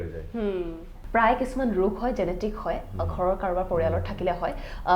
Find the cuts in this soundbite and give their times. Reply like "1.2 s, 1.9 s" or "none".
0.9 s